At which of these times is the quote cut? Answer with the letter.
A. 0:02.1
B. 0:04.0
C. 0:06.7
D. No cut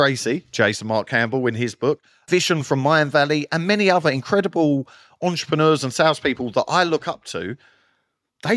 A